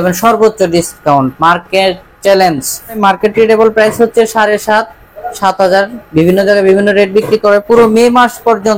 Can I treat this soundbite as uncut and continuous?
no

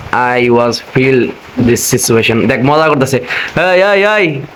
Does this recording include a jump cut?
no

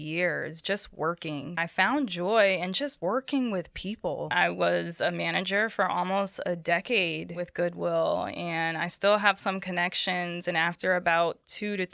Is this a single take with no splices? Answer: no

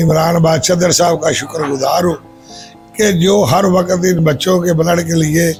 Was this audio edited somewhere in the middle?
no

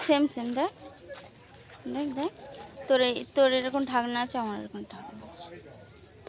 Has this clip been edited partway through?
no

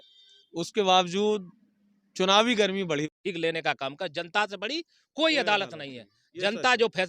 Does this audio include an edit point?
yes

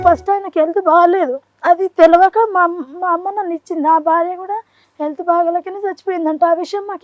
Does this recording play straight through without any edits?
yes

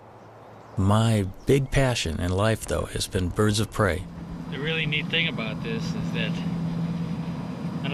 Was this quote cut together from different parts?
no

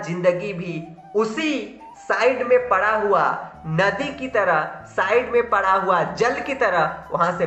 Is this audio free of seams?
yes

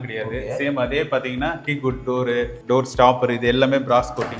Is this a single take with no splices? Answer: yes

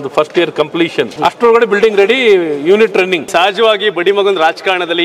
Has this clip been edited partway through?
yes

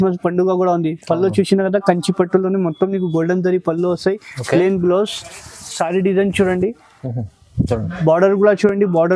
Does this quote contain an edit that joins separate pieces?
no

